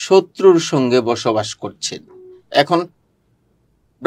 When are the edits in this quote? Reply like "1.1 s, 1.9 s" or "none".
none